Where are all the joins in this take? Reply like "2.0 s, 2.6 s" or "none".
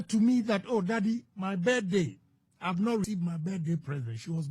3.1 s